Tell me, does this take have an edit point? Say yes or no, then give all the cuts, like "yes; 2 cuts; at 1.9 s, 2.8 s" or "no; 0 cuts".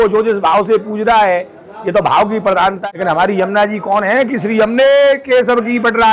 yes; 1 cut; at 2.8 s